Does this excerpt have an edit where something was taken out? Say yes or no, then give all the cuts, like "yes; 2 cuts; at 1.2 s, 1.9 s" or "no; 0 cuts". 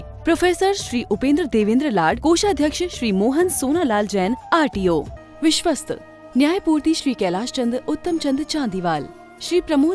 yes; 1 cut; at 5.2 s